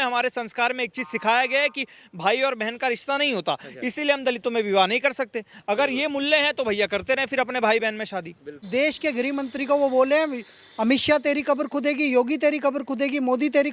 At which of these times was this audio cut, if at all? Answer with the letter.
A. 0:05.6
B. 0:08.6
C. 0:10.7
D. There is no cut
B